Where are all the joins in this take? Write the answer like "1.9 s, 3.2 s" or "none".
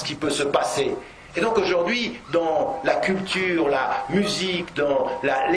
none